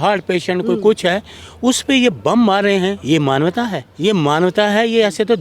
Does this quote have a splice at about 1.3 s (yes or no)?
no